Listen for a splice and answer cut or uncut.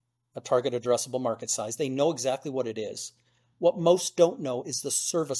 uncut